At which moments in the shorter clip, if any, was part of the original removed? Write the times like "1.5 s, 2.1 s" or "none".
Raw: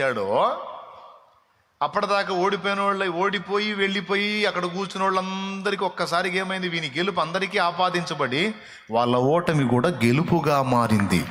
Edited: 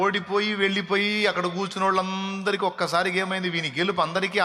none